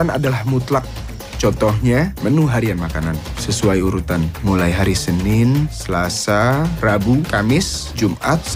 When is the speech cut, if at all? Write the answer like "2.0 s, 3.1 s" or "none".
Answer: none